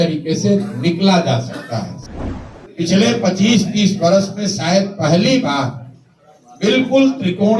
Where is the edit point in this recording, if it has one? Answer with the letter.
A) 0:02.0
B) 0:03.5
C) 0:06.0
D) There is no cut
A